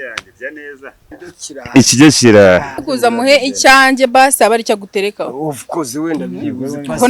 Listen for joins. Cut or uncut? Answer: cut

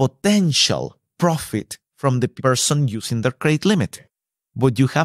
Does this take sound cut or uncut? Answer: cut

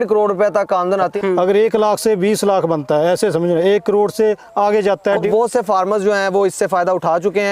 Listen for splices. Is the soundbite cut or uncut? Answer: cut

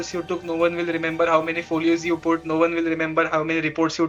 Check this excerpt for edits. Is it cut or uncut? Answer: uncut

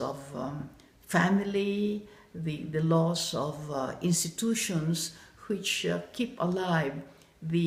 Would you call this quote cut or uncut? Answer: uncut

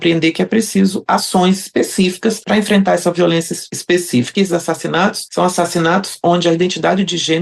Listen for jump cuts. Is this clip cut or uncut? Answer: cut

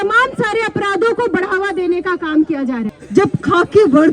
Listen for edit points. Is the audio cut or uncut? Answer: cut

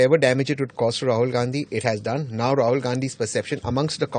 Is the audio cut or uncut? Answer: uncut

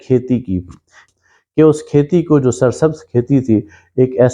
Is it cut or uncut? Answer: cut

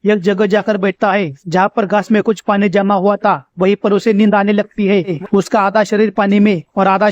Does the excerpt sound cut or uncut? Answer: cut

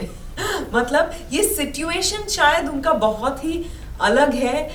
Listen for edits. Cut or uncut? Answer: uncut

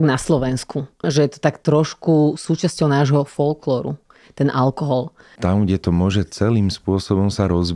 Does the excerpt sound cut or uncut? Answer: cut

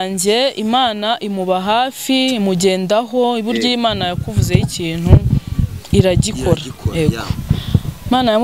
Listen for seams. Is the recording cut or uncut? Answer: uncut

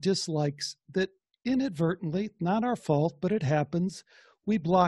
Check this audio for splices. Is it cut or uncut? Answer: cut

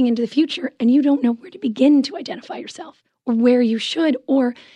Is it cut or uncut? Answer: uncut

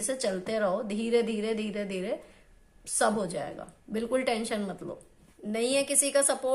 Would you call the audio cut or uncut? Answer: uncut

